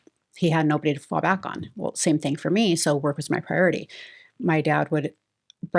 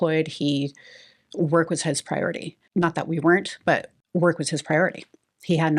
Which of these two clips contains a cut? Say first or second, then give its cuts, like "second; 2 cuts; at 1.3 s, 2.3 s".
second; 2 cuts; at 2.5 s, 4.0 s